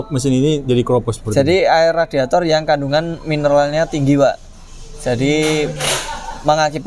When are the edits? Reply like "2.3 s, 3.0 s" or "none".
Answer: none